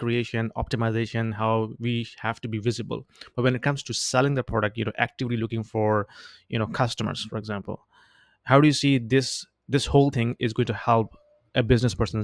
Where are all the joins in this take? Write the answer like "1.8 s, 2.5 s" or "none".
none